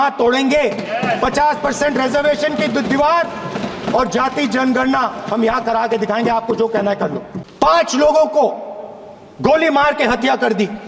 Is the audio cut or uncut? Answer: cut